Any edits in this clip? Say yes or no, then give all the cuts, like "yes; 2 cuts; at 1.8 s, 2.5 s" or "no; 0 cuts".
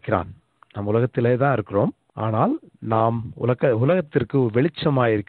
yes; 1 cut; at 2.1 s